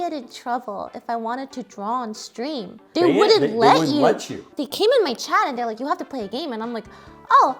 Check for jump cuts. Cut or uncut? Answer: cut